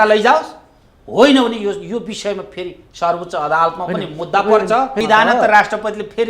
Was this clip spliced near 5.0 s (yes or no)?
yes